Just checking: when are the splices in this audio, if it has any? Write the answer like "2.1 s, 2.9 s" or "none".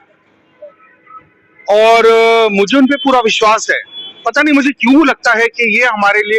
none